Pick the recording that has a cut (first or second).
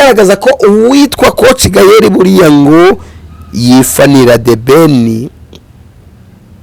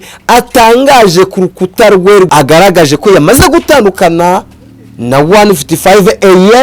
second